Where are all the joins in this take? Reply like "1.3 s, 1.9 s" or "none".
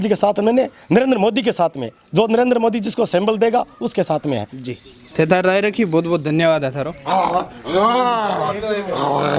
none